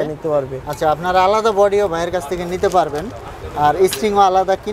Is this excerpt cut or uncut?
uncut